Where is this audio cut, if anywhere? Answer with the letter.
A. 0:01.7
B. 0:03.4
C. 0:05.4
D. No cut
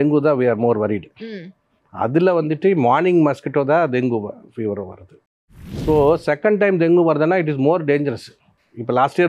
C